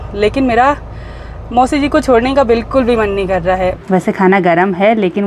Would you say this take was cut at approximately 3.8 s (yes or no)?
yes